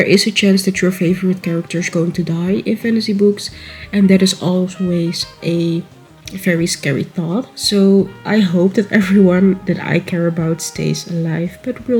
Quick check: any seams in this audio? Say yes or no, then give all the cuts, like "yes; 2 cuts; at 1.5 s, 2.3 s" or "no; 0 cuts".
no; 0 cuts